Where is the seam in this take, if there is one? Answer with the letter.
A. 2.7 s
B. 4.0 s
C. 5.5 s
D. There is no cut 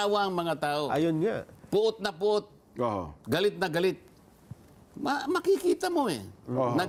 D